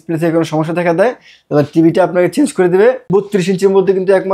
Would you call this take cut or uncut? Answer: cut